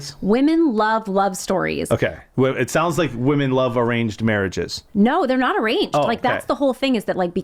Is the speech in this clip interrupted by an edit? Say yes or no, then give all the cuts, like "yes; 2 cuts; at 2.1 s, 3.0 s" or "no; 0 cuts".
no; 0 cuts